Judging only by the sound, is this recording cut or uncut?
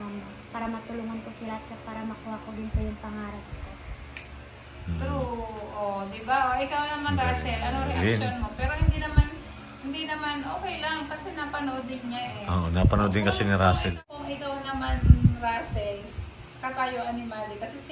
cut